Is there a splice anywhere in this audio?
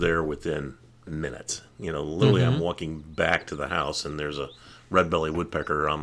no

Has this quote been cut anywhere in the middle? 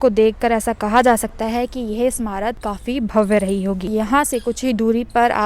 yes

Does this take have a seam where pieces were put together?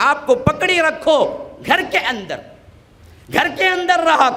no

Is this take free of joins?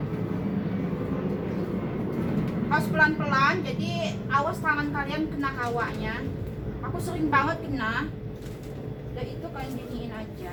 yes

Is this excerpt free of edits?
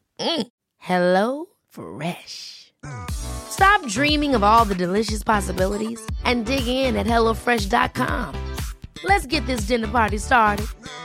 yes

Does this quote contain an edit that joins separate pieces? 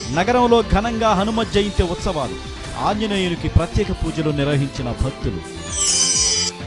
yes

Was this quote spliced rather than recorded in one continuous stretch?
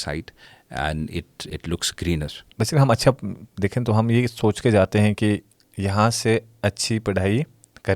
yes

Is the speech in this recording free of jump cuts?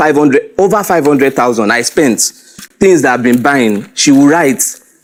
yes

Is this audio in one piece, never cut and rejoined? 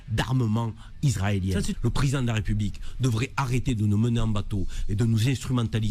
yes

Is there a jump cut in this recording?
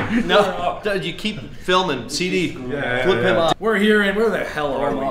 yes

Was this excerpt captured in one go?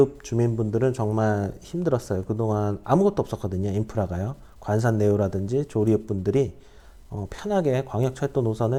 yes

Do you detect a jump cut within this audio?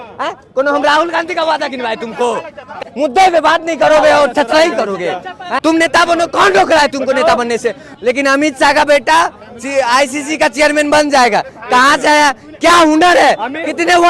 yes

